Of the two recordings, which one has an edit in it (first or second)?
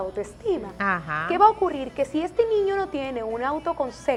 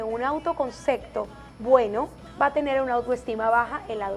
second